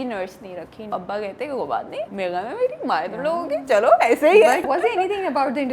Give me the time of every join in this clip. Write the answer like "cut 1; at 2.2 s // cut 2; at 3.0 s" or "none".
cut 1; at 0.9 s // cut 2; at 2.1 s // cut 3; at 4.6 s